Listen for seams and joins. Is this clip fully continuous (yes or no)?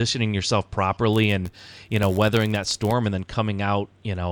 yes